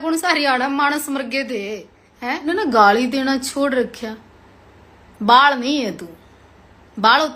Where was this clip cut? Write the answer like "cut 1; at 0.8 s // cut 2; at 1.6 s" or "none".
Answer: cut 1; at 2.5 s